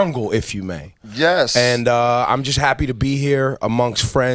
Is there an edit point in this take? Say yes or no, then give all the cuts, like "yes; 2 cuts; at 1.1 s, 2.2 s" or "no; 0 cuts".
yes; 1 cut; at 1.2 s